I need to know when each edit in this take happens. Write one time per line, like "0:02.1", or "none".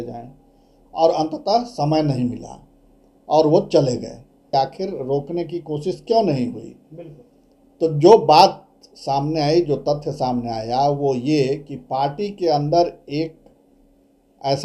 0:04.4